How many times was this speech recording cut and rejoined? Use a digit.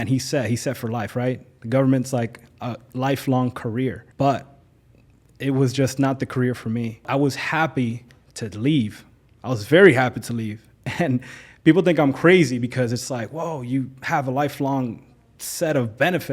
2